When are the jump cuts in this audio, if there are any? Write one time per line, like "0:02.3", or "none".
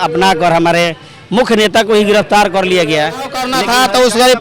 0:03.5